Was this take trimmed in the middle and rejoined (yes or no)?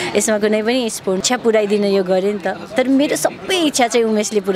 yes